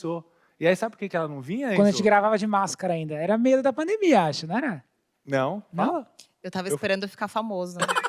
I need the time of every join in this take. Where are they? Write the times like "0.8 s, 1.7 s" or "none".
none